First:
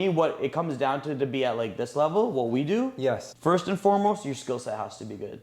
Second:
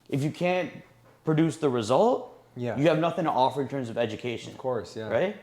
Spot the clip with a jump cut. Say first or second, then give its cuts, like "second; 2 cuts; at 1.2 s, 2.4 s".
first; 1 cut; at 3.3 s